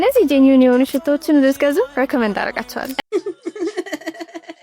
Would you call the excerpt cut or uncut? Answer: cut